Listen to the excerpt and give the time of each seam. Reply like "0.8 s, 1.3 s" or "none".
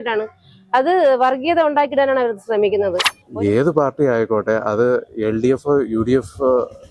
3.1 s